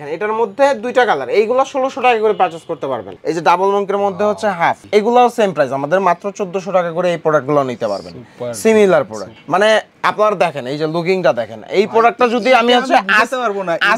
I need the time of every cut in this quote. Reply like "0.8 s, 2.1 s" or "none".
3.0 s